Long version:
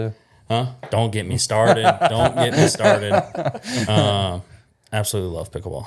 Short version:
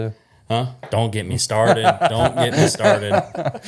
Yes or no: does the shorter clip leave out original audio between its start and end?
no